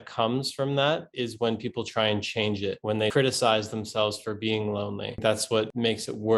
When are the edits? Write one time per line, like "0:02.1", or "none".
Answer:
0:05.2